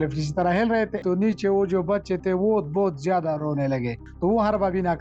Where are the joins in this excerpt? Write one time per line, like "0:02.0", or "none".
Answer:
0:01.0
0:04.0